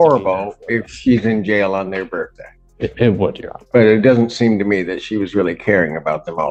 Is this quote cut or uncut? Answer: uncut